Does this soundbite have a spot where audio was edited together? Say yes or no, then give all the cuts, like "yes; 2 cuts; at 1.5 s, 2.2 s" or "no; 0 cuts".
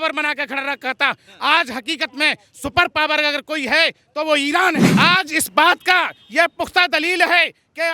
yes; 1 cut; at 4.9 s